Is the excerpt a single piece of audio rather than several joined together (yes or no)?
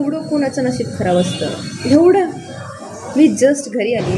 yes